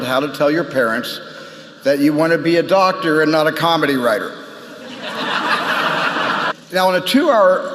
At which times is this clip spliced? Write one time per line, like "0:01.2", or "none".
none